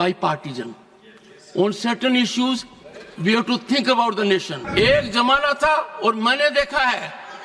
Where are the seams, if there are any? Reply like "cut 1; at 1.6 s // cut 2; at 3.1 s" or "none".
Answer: cut 1; at 4.6 s